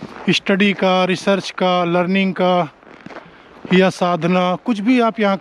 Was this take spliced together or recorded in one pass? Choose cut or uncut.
uncut